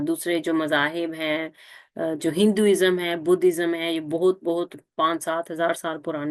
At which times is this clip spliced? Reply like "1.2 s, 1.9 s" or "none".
none